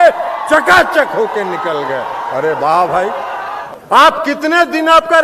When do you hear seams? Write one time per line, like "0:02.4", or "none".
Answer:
0:03.5